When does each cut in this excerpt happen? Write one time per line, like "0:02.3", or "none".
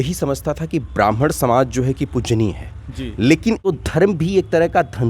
0:03.7